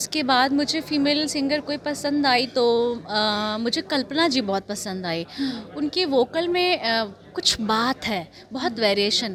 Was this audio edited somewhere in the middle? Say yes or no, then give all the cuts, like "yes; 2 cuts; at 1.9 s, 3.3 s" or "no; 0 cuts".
no; 0 cuts